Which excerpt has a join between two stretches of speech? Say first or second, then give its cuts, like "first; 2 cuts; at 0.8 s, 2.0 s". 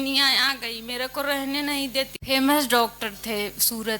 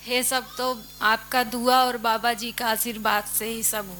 first; 1 cut; at 2.2 s